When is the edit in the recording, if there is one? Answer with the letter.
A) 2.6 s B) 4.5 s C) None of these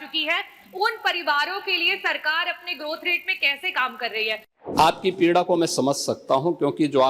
B